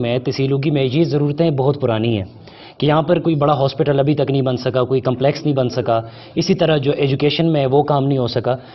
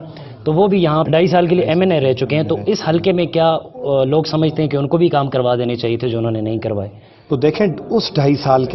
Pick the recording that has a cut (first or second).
second